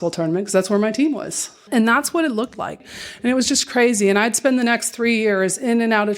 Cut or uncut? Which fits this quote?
cut